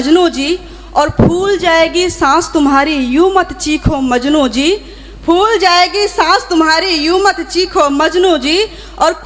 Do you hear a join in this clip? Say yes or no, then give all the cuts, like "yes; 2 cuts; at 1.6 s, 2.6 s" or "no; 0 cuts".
no; 0 cuts